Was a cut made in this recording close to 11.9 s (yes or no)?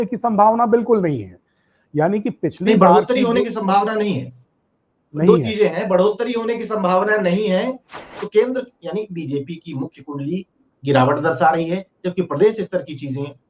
no